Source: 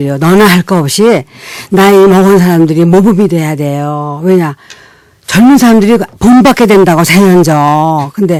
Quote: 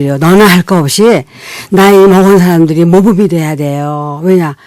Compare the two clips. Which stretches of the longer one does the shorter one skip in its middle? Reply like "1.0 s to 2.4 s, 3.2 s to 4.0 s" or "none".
none